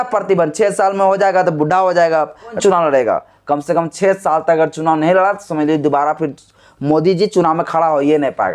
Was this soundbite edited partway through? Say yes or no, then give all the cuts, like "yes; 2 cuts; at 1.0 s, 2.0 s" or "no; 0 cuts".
yes; 1 cut; at 2.6 s